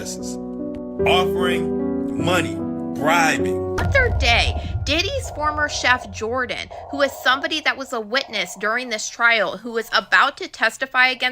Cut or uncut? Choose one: cut